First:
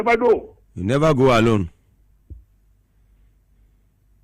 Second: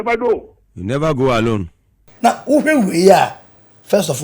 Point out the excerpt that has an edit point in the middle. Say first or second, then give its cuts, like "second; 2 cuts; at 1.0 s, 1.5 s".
second; 1 cut; at 2.1 s